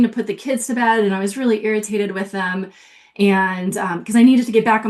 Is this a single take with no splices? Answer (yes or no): yes